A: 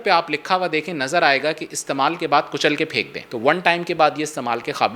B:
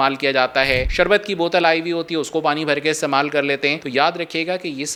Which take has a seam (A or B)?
A